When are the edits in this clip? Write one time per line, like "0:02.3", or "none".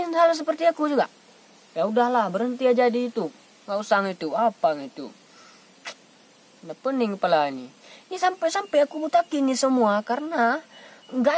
none